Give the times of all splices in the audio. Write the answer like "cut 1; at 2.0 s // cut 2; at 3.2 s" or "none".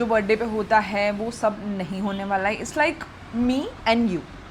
none